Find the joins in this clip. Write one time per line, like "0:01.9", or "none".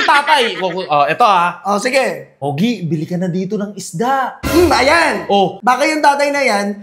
0:02.3
0:05.6